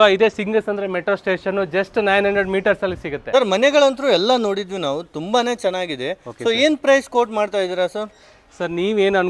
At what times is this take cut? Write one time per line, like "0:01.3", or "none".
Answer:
none